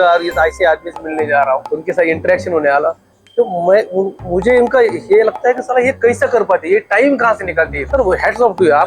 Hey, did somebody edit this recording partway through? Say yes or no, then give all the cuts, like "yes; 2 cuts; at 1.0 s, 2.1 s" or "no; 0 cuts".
yes; 2 cuts; at 1.7 s, 7.8 s